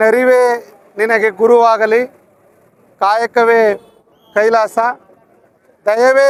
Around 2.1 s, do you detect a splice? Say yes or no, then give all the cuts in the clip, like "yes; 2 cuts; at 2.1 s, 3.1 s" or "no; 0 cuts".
no; 0 cuts